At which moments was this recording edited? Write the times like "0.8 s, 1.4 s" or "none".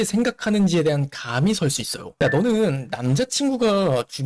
2.1 s

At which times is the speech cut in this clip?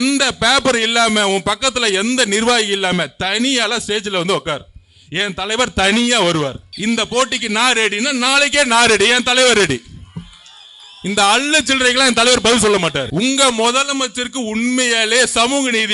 6.7 s, 13.1 s

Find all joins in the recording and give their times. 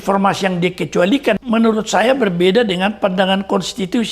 1.4 s

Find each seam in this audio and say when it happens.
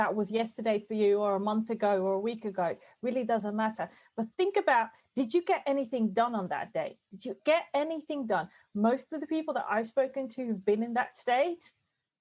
none

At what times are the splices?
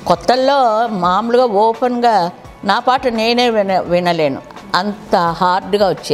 none

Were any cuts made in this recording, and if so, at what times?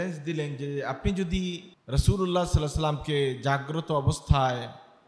1.7 s

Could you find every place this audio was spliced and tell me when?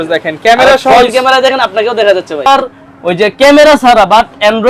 2.4 s

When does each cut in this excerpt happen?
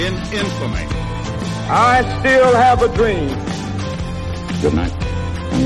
none

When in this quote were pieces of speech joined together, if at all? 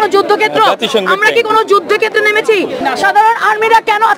2.8 s

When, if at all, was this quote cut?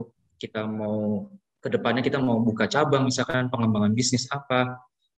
none

